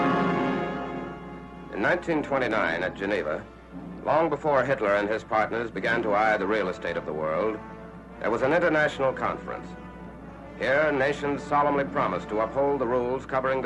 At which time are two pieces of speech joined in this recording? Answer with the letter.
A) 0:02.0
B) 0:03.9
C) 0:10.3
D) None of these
B